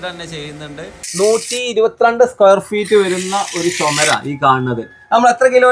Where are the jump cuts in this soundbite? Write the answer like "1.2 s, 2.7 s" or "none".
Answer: 1.0 s